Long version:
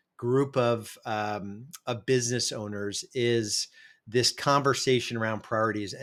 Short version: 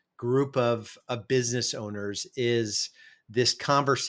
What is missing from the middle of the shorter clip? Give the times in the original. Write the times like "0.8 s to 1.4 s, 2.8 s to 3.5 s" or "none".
0.9 s to 1.7 s